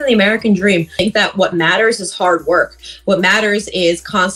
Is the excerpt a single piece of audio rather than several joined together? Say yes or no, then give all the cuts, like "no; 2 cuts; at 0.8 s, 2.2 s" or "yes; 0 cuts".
no; 1 cut; at 0.9 s